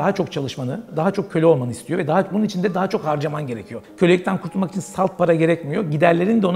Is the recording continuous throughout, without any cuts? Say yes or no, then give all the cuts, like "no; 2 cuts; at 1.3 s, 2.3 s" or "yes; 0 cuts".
no; 1 cut; at 3.8 s